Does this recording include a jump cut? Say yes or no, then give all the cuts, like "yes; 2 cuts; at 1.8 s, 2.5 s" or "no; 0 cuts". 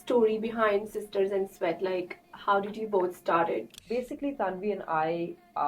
yes; 1 cut; at 3.8 s